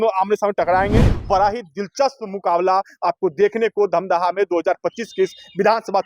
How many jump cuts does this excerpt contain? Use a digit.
1